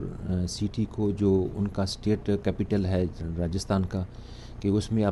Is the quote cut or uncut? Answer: uncut